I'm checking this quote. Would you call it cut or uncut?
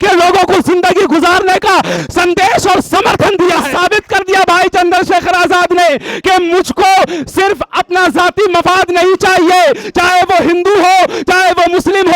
cut